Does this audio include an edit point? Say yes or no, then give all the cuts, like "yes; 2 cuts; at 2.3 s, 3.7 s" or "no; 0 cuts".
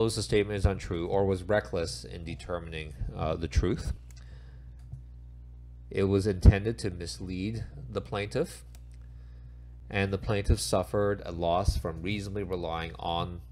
yes; 1 cut; at 1.4 s